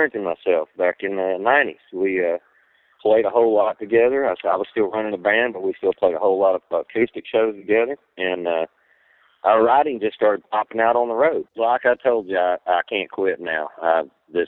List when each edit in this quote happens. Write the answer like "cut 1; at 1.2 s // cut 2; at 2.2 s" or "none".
cut 1; at 11.5 s